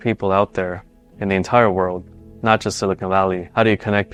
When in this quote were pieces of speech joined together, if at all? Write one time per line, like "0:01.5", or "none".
none